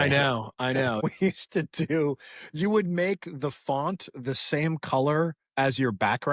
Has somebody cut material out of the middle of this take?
yes; 1 cut; at 1.0 s

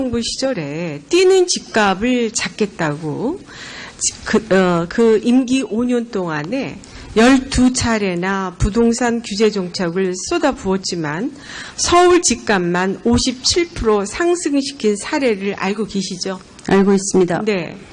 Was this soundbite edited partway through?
no; 0 cuts

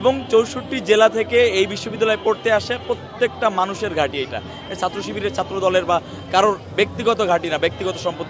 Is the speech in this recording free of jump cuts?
yes; 0 cuts

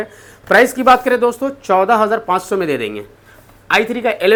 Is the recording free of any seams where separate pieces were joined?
yes; 0 cuts

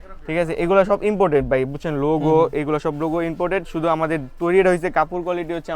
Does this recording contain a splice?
no; 0 cuts

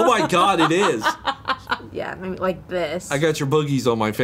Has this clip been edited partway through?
yes; 1 cut; at 1.9 s

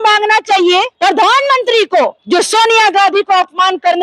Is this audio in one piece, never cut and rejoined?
no; 2 cuts; at 0.9 s, 2.2 s

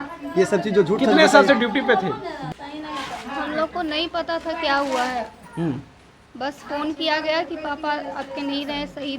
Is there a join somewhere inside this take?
yes; 1 cut; at 2.4 s

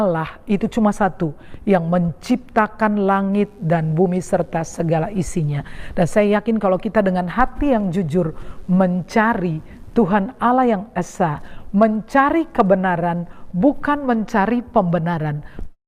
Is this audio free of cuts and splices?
yes; 0 cuts

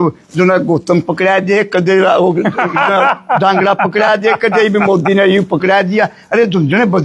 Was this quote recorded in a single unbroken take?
yes; 0 cuts

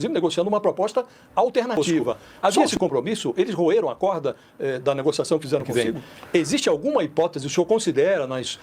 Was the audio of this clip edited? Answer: yes; 2 cuts; at 2.2 s, 5.7 s

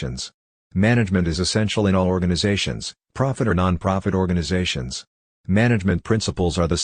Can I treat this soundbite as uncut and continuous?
no; 1 cut; at 1.0 s

